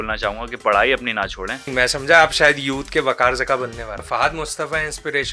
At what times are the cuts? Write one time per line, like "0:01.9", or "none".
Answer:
0:01.7
0:04.0

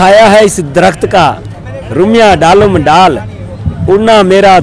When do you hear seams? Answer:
none

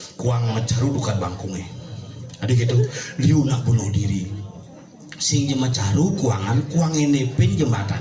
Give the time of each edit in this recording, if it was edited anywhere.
none

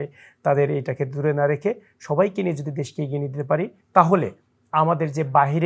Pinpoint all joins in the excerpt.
0:03.8

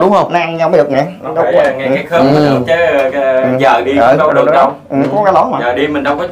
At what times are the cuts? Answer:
none

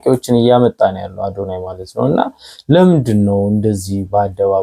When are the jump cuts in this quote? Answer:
none

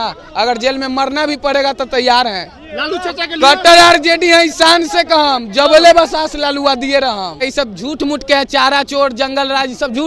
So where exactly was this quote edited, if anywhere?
0:07.4

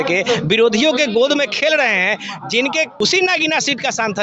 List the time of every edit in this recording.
0:02.9

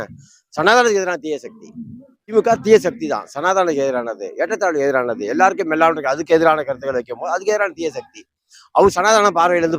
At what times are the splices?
0:02.3

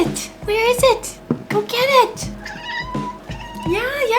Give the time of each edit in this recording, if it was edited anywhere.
0:03.2

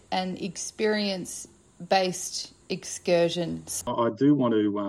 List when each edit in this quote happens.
0:03.9

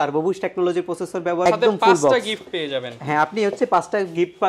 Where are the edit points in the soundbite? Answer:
0:01.4

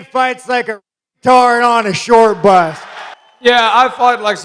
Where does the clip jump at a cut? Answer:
none

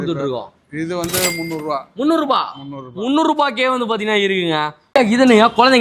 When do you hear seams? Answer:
0:04.9

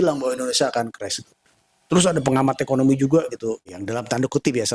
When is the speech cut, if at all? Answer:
0:03.8

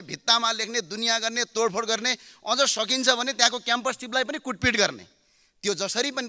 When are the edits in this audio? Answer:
none

